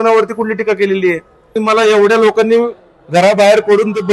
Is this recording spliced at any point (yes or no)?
yes